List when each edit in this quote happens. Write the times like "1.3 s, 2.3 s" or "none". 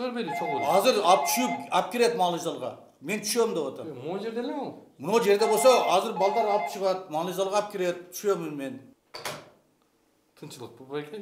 8.9 s